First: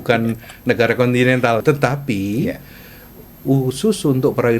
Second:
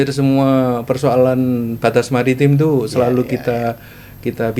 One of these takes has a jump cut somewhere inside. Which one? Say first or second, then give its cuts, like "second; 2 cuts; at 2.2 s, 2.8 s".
first; 1 cut; at 1.6 s